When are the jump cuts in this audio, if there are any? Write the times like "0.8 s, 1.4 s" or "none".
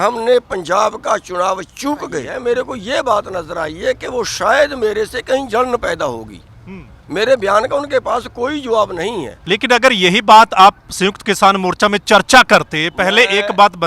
2.3 s, 9.3 s